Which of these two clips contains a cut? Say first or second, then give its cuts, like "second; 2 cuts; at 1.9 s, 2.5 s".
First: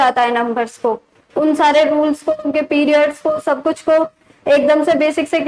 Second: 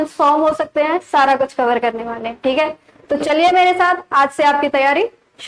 first; 1 cut; at 1.2 s